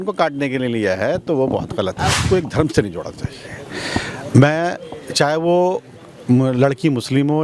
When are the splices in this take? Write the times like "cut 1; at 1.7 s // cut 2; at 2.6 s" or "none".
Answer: cut 1; at 2.2 s